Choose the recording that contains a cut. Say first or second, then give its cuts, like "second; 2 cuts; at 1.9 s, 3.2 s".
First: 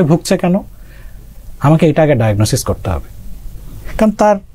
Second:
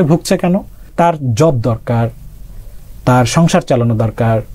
second; 1 cut; at 0.9 s